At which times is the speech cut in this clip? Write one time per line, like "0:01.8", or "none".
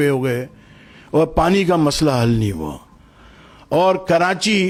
none